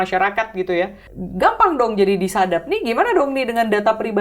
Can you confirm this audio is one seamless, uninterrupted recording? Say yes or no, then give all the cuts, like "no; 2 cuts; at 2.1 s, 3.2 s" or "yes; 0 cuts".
no; 1 cut; at 1.1 s